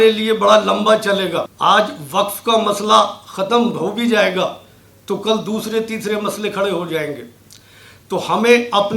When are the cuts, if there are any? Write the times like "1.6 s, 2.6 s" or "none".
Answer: 1.5 s